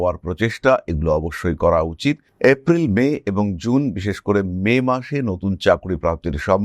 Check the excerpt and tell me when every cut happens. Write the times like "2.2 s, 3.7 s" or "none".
none